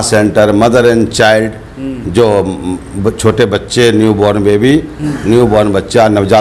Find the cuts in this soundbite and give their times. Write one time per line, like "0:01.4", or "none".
none